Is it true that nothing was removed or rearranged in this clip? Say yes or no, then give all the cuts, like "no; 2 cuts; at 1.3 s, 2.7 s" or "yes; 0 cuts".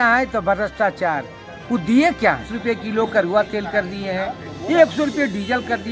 no; 1 cut; at 2.5 s